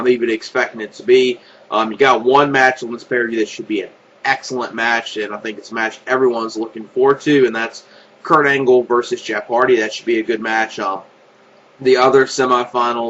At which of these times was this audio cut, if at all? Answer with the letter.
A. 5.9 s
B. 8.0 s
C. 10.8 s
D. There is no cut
C